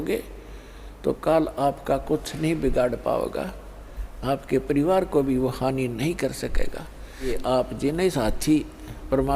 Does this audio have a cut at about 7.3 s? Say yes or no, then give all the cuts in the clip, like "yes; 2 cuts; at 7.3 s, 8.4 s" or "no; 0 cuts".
yes; 1 cut; at 7.3 s